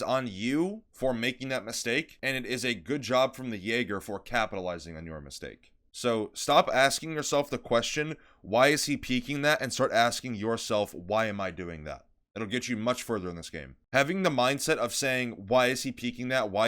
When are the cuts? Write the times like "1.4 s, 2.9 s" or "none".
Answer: 0.9 s, 2.1 s